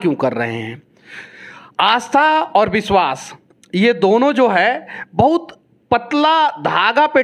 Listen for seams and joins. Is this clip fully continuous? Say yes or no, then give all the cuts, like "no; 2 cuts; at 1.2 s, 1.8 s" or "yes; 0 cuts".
yes; 0 cuts